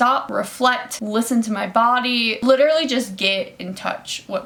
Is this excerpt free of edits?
yes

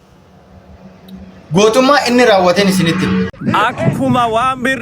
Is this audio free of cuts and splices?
no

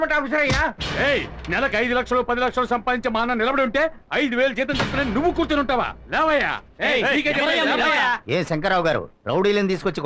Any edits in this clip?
no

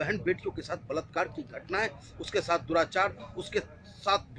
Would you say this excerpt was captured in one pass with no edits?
yes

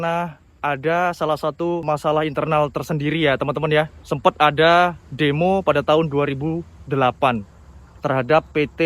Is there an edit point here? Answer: yes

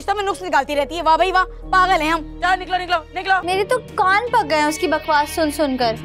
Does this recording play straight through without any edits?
no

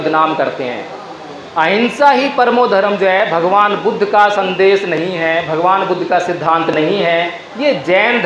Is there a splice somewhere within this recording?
no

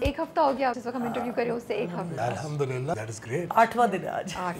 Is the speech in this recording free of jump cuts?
no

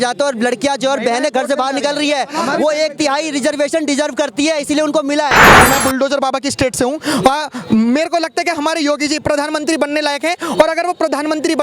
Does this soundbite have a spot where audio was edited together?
yes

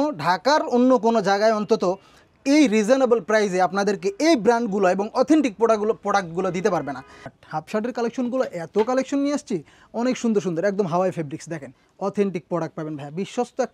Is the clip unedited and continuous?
no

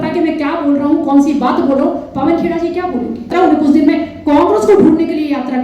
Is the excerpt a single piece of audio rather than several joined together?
no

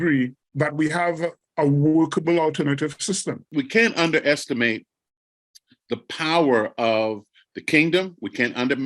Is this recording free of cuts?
no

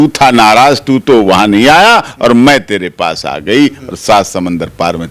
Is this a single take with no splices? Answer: yes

